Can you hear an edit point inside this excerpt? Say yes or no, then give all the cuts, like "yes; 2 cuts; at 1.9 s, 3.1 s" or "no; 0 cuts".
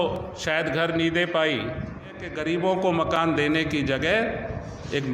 yes; 1 cut; at 2.3 s